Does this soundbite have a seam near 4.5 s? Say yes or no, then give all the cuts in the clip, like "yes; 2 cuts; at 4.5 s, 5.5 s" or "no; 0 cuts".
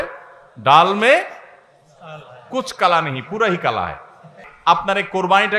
yes; 1 cut; at 4.5 s